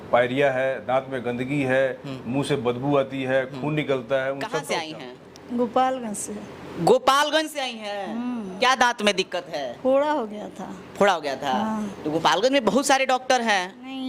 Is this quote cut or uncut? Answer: cut